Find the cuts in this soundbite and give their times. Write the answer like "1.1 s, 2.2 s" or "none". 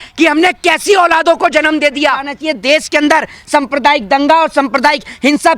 2.4 s